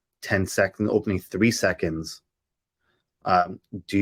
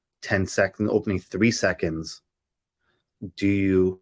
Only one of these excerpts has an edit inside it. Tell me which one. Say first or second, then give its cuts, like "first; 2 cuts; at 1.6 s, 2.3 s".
second; 1 cut; at 3.1 s